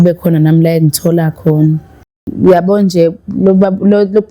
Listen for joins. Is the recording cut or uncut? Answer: cut